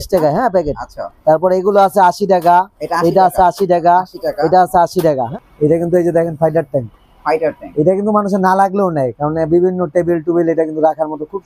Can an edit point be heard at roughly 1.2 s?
no; 1 cut; at 5.3 s

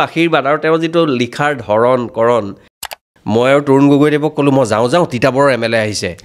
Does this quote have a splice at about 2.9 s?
yes; 1 cut; at 2.9 s

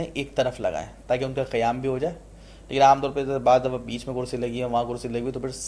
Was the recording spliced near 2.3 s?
no; 0 cuts

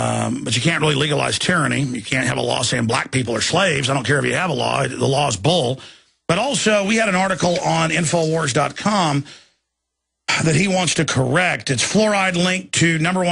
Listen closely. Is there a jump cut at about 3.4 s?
yes; 1 cut; at 3.4 s

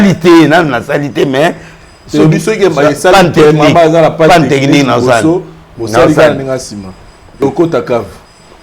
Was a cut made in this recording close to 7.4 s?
yes; 1 cut; at 7.4 s

